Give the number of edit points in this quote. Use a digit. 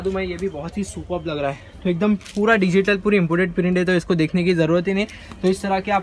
0